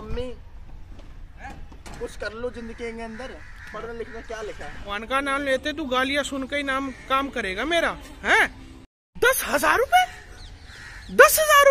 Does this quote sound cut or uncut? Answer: cut